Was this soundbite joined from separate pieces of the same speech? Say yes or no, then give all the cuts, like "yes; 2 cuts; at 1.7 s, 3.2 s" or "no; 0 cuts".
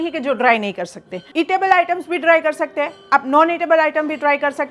yes; 1 cut; at 1.2 s